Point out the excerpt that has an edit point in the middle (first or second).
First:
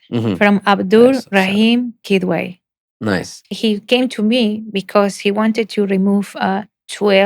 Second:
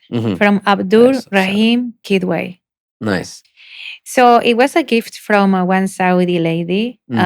first